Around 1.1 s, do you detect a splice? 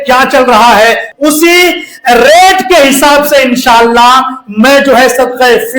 yes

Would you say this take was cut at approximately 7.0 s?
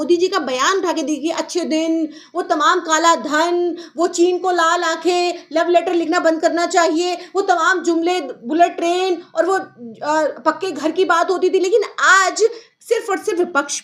no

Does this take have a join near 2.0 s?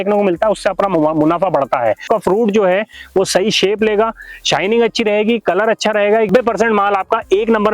yes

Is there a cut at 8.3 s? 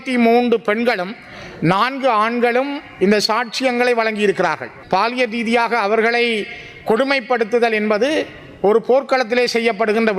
no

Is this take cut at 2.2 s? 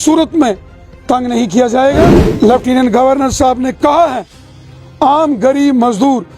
yes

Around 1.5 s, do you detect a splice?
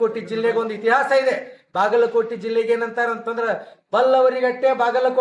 no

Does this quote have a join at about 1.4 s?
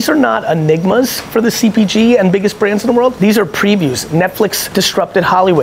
no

